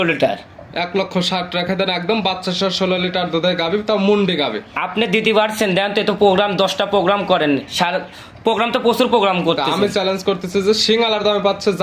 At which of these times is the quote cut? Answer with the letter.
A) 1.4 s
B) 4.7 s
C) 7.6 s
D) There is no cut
D